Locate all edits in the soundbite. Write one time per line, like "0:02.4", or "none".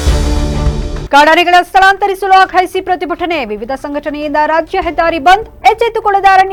none